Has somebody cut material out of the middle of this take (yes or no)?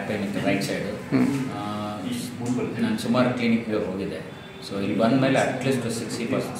no